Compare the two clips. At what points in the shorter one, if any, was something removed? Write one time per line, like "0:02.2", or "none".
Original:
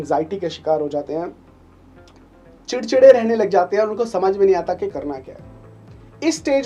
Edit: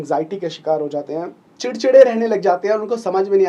0:01.4